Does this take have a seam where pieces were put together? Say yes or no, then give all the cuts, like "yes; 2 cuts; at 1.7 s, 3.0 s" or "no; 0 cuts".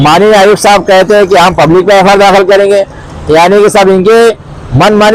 no; 0 cuts